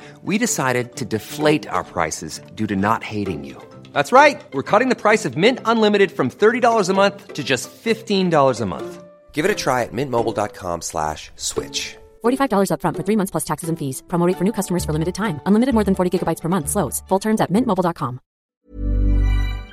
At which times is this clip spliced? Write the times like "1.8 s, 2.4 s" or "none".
18.4 s

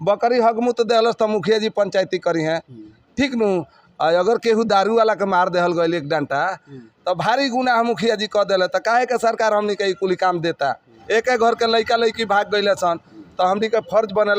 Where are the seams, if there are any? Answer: 10.9 s

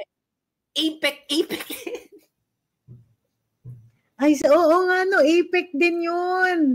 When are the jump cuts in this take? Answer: none

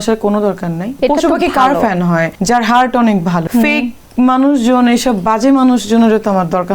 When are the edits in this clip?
1.0 s, 2.3 s, 3.4 s

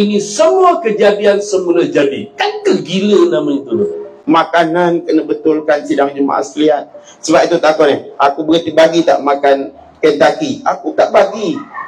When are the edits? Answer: 4.2 s

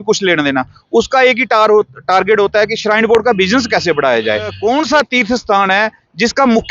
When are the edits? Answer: 4.5 s

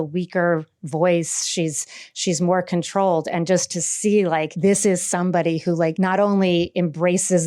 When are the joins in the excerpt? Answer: 4.5 s, 5.9 s

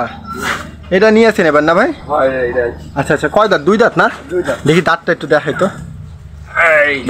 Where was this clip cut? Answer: none

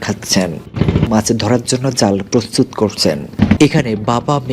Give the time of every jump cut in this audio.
1.1 s, 3.6 s

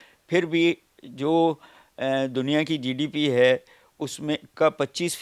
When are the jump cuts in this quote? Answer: none

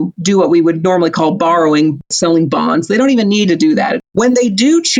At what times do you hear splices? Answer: 2.1 s, 4.0 s

